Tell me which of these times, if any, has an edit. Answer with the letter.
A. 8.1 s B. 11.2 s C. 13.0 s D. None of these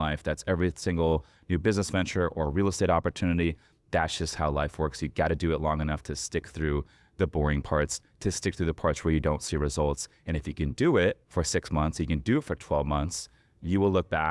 B